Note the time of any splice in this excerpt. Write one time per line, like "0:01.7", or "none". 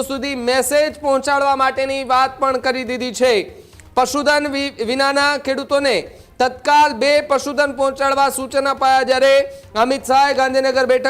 none